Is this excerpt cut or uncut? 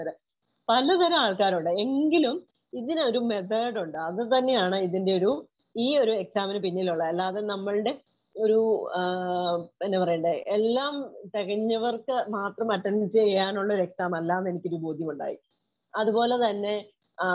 uncut